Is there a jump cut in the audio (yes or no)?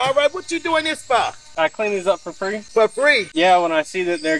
yes